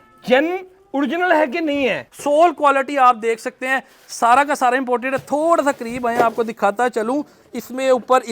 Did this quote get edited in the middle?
yes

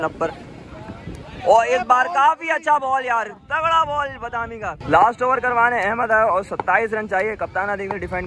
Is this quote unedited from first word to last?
no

